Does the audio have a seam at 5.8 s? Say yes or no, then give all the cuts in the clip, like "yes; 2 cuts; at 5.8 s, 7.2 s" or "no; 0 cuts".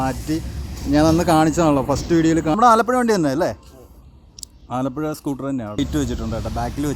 yes; 2 cuts; at 2.5 s, 5.8 s